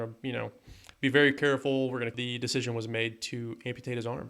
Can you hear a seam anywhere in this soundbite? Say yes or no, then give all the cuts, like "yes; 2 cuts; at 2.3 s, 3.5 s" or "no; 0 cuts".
yes; 1 cut; at 2.1 s